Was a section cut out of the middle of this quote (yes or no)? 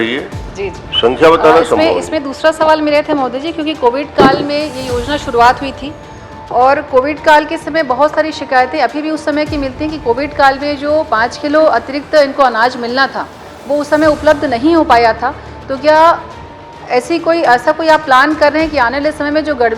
no